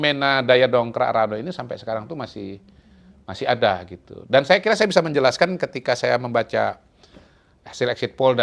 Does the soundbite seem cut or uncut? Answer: uncut